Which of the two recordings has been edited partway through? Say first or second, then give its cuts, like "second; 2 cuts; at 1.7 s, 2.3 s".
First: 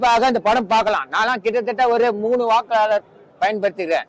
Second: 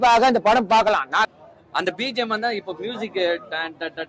second; 1 cut; at 1.3 s